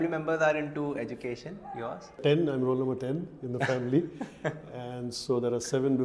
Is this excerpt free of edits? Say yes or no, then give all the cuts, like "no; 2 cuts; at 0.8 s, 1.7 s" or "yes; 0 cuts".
no; 1 cut; at 2.2 s